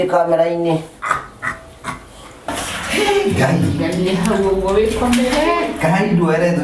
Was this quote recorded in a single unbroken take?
no; 1 cut; at 2.5 s

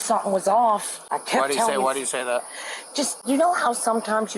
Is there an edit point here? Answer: yes; 2 cuts; at 1.0 s, 3.2 s

